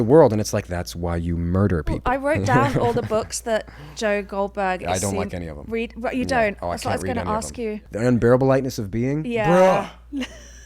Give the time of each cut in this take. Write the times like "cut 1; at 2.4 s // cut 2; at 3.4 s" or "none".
cut 1; at 2.0 s // cut 2; at 7.8 s